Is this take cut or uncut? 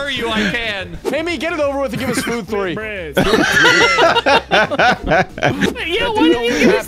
cut